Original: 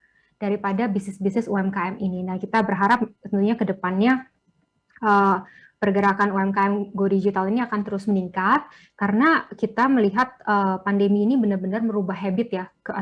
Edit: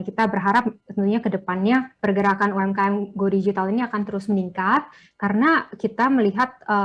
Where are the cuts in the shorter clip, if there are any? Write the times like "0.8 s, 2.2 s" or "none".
1.9 s